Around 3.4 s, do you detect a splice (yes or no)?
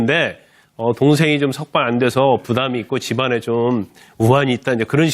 yes